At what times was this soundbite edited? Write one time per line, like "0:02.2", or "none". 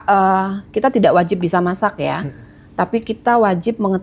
none